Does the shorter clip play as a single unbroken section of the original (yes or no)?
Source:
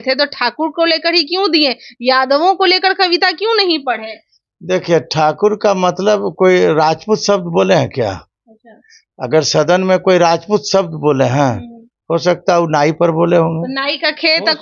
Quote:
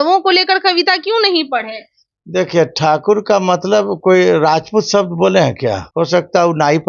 no